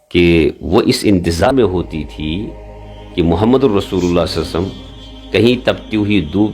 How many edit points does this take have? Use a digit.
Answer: 1